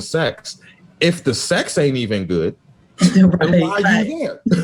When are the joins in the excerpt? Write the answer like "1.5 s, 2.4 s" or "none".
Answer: none